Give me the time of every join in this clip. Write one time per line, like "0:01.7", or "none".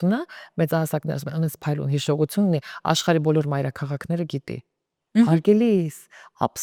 none